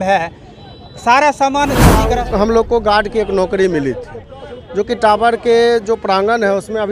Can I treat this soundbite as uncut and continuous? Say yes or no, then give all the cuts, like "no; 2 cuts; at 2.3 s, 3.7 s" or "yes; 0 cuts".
no; 1 cut; at 1.9 s